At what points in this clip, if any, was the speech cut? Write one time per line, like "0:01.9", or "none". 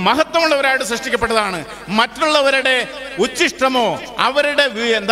none